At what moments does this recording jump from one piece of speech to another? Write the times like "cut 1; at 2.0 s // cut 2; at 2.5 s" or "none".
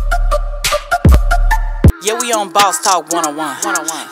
none